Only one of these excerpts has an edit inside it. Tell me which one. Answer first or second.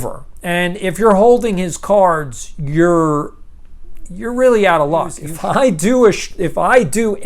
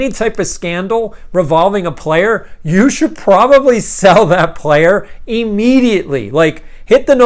first